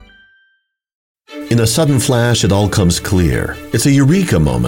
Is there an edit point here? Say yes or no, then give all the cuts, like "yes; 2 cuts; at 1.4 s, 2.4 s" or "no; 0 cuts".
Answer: yes; 1 cut; at 1.1 s